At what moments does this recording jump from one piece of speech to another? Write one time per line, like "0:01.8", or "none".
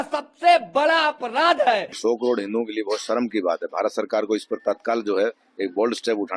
0:02.0